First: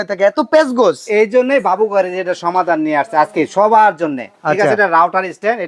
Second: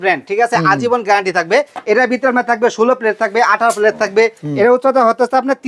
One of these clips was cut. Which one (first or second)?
second